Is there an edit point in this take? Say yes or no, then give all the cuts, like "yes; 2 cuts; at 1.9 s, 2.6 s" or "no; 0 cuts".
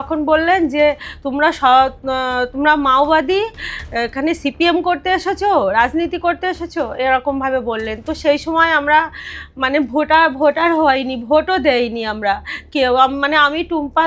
no; 0 cuts